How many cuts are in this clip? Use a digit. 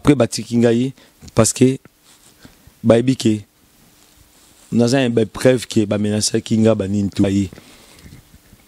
1